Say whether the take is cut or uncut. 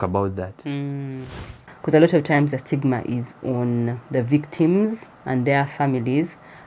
cut